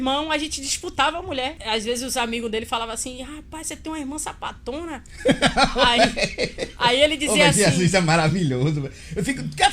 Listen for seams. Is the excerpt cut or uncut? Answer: cut